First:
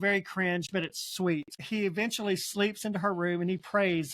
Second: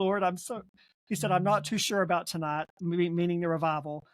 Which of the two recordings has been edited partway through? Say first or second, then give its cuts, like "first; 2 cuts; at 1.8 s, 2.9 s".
first; 1 cut; at 1.6 s